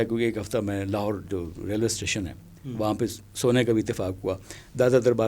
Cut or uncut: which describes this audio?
uncut